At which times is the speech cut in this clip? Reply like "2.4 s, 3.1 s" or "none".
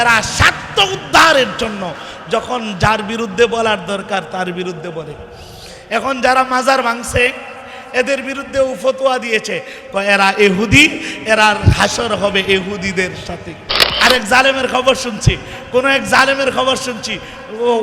13.8 s